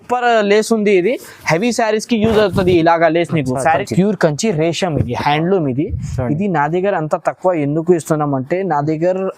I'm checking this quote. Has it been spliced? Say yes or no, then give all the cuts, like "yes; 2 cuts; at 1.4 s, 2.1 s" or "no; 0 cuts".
yes; 1 cut; at 3.8 s